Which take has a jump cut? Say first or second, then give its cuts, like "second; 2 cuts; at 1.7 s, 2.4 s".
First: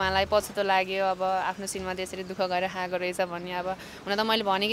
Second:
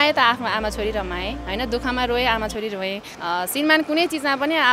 second; 1 cut; at 3.1 s